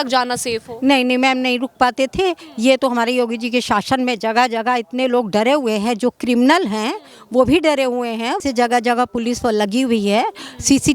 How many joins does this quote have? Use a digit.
1